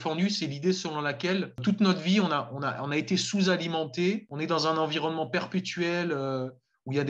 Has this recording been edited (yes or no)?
yes